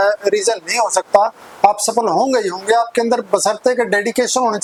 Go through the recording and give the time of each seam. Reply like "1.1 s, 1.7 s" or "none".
none